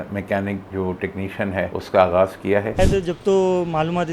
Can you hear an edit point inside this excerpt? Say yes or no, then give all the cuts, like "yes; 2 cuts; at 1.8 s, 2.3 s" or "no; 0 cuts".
yes; 2 cuts; at 1.7 s, 2.8 s